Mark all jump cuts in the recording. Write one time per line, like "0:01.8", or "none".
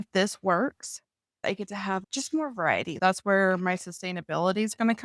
0:01.4
0:03.0